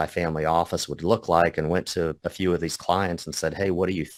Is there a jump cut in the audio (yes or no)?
no